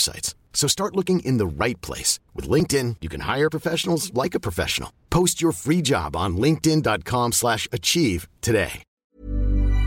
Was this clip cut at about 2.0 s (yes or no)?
no